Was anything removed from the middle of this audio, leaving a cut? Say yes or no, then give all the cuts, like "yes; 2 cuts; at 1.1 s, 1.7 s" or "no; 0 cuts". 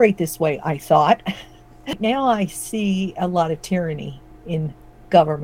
yes; 1 cut; at 2.0 s